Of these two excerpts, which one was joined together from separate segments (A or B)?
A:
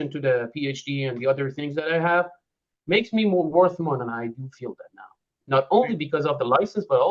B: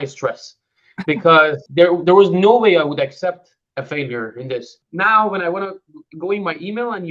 B